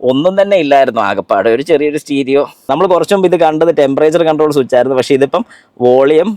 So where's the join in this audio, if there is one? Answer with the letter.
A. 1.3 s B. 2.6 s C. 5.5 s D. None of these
B